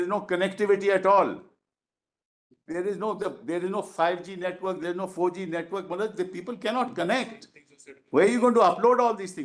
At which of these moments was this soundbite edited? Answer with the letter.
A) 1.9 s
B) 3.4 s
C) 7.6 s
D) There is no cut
D